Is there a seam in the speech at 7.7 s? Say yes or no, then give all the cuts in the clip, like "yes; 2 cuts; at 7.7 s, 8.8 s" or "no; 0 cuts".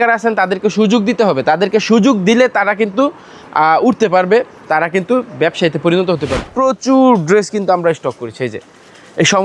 no; 1 cut; at 6.4 s